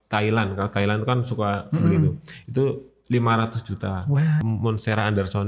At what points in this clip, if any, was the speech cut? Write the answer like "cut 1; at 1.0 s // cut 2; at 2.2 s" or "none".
cut 1; at 4.4 s